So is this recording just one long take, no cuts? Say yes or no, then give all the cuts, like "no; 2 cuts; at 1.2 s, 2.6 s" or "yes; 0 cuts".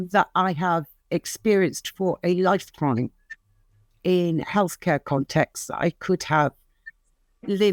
yes; 0 cuts